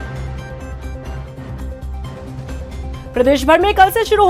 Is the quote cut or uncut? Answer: cut